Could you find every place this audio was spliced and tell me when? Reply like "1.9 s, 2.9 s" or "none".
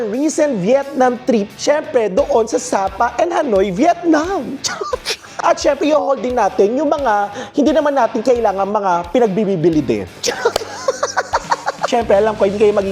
5.3 s, 11.8 s